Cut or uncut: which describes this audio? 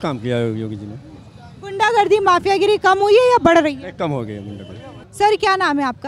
uncut